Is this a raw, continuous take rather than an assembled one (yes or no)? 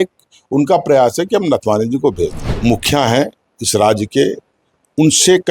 no